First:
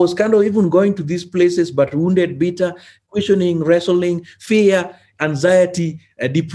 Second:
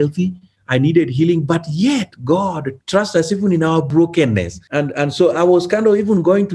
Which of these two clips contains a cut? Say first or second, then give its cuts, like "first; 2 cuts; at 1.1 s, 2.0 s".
second; 3 cuts; at 2.7 s, 3.9 s, 4.6 s